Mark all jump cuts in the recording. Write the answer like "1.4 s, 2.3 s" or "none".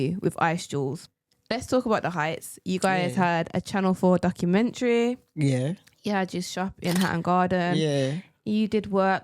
1.0 s